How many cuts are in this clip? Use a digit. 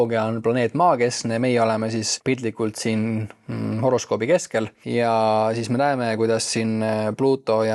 2